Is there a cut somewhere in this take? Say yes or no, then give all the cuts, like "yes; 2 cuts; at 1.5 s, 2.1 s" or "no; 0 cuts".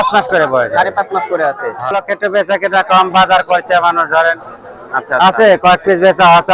yes; 1 cut; at 1.9 s